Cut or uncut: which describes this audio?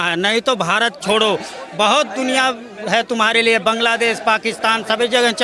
uncut